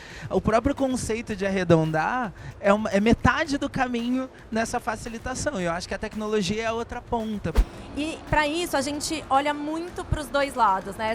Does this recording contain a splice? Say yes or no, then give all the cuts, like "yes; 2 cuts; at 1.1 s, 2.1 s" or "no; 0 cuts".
yes; 1 cut; at 7.6 s